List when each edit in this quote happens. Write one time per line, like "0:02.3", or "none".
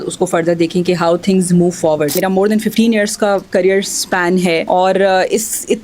0:02.1
0:04.6